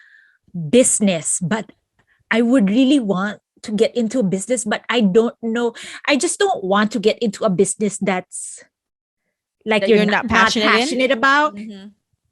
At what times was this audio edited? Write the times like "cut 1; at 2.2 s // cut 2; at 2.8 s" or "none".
none